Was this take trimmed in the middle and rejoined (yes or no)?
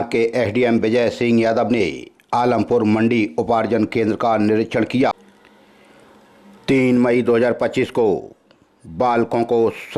yes